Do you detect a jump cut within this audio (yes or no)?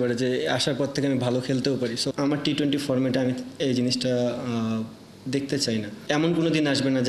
yes